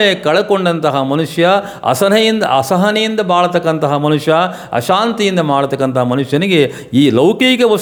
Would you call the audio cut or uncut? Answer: uncut